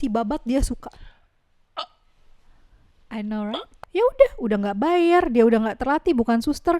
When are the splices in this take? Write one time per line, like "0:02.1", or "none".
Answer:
0:03.7